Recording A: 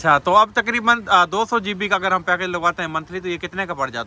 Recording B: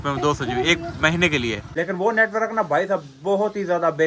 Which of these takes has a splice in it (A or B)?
B